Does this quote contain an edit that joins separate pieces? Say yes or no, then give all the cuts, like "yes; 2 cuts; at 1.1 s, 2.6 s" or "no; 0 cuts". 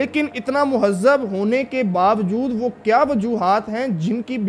no; 0 cuts